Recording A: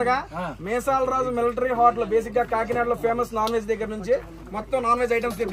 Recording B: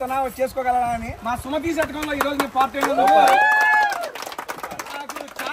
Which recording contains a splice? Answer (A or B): B